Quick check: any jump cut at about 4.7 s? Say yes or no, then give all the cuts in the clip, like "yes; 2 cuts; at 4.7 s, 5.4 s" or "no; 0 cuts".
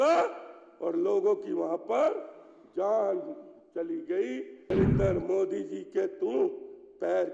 yes; 1 cut; at 4.7 s